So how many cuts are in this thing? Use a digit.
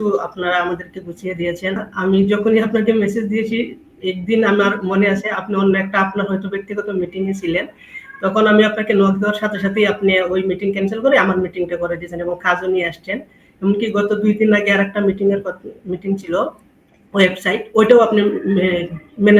1